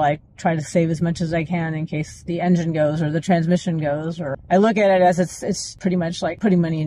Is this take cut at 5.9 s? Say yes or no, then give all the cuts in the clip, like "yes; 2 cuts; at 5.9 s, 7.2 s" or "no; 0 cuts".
yes; 2 cuts; at 4.4 s, 5.9 s